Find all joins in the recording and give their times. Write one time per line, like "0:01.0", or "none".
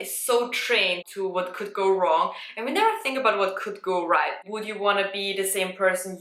0:01.1
0:04.4